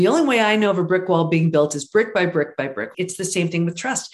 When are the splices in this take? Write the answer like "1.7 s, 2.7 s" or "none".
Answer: 2.9 s